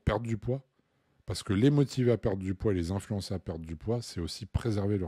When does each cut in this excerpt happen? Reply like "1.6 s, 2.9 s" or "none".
none